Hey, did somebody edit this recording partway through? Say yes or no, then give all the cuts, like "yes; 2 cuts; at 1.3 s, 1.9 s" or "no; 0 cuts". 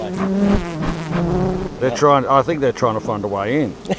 no; 0 cuts